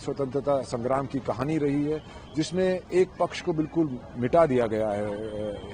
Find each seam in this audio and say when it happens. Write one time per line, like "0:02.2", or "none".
none